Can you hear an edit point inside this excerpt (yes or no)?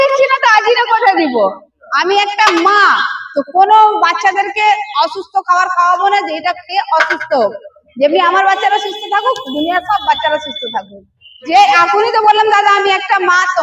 no